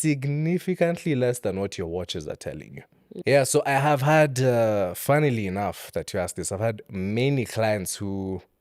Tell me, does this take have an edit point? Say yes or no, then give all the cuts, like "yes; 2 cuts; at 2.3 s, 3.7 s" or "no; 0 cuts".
yes; 1 cut; at 3.2 s